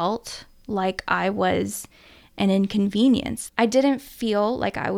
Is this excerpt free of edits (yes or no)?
no